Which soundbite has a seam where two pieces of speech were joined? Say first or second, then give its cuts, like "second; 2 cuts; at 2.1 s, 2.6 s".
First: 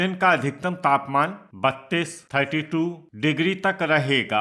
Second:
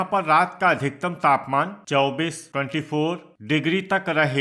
second; 2 cuts; at 1.8 s, 3.3 s